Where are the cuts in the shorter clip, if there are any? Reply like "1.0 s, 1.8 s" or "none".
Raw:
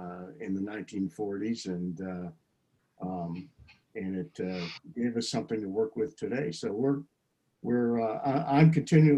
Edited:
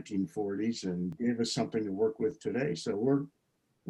1.1 s

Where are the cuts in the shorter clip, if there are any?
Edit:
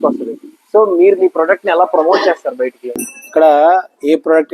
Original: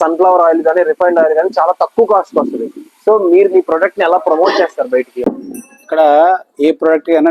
2.8 s

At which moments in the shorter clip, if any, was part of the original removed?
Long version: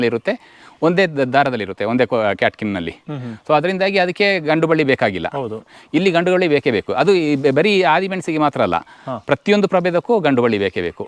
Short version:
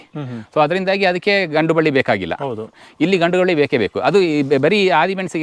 none

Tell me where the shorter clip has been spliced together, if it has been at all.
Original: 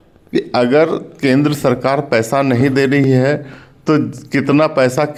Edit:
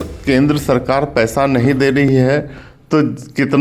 none

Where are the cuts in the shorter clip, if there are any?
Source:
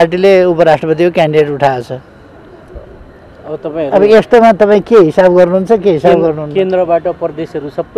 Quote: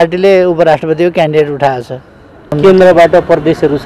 2.5 s

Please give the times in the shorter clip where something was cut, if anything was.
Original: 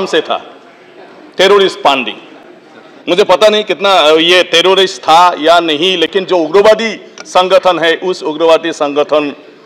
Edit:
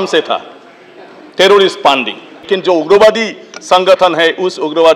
2.5 s

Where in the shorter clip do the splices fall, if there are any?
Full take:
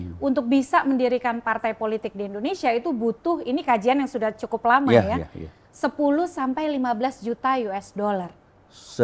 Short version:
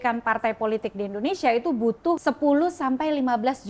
2.2 s

